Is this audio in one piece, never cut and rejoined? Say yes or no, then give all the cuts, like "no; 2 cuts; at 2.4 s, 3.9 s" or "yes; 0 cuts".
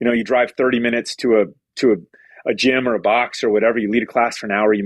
yes; 0 cuts